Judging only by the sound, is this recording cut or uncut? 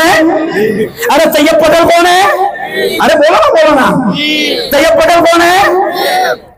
uncut